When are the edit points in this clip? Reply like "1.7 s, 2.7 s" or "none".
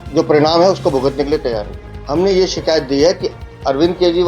1.9 s